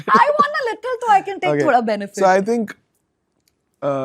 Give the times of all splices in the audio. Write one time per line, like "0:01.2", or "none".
none